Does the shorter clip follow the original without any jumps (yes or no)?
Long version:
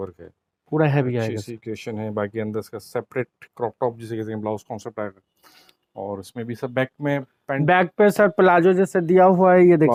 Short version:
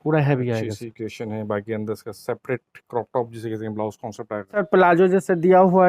no